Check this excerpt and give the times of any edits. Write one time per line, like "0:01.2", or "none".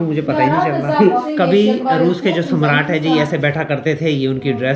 0:01.2